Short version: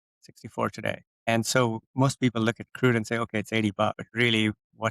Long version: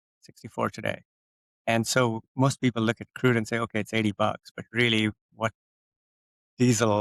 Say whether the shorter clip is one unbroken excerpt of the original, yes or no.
no